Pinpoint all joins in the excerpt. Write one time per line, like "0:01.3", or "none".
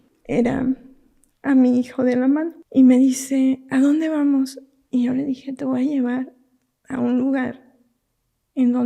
0:02.6